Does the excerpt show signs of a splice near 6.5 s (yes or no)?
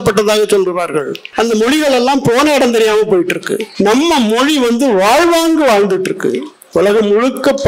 no